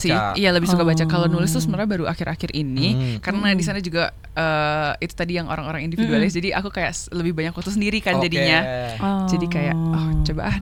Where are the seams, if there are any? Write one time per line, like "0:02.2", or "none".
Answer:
none